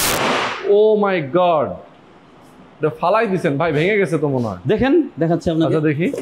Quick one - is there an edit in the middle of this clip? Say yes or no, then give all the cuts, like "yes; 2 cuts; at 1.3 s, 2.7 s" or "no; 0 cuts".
no; 0 cuts